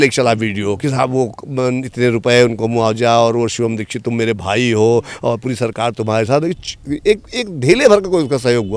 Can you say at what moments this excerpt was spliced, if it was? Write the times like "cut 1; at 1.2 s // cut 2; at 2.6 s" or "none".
none